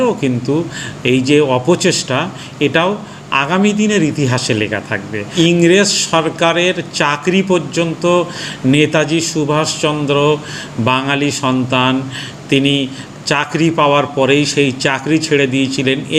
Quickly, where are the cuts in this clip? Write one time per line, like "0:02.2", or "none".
0:05.3